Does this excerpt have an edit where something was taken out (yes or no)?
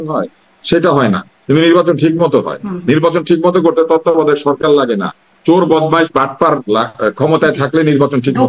no